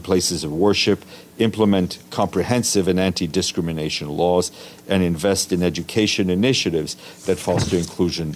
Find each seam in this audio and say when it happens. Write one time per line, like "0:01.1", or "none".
none